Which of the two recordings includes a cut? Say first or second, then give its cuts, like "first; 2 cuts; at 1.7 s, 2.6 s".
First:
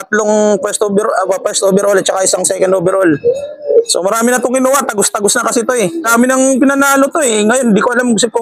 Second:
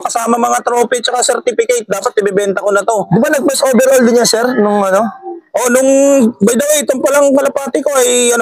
first; 1 cut; at 6.0 s